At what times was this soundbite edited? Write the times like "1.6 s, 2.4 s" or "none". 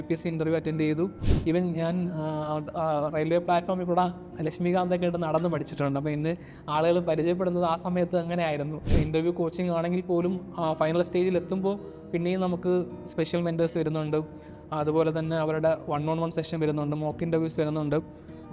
1.3 s, 8.9 s